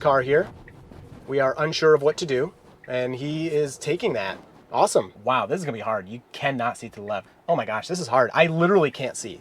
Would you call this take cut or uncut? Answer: cut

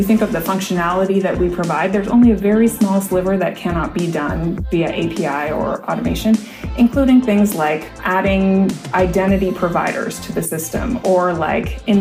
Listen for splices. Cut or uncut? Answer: uncut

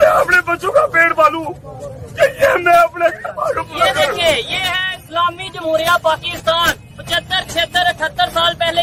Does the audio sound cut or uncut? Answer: uncut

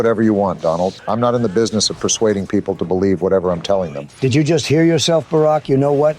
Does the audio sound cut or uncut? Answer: cut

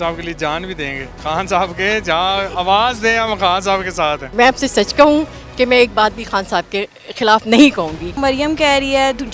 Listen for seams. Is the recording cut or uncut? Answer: cut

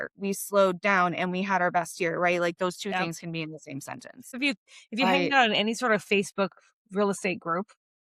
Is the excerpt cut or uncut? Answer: cut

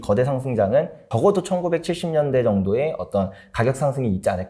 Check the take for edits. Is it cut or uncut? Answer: uncut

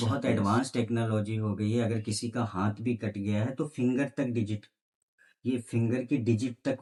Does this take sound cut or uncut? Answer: uncut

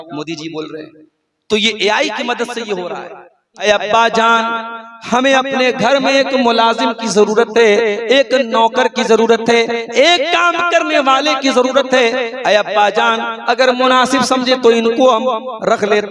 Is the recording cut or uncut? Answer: cut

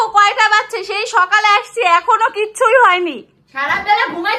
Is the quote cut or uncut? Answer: uncut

